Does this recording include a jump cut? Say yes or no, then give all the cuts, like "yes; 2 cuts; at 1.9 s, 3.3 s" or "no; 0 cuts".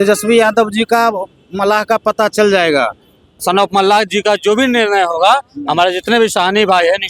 yes; 1 cut; at 3.4 s